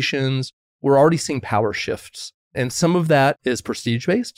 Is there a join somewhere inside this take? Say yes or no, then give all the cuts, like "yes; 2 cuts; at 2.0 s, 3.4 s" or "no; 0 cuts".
yes; 3 cuts; at 0.8 s, 2.4 s, 3.4 s